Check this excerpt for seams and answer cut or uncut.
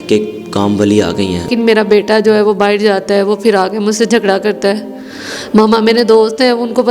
cut